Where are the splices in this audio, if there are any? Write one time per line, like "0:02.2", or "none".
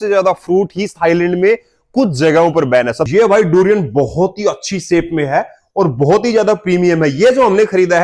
0:03.0